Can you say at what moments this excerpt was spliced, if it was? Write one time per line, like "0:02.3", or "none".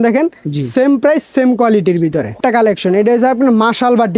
0:02.3